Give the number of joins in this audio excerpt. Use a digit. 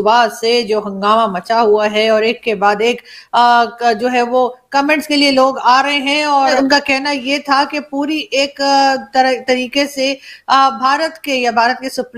1